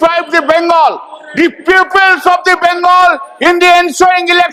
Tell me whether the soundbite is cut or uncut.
uncut